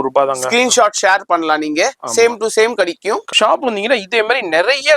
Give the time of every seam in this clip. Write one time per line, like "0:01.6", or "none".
0:03.3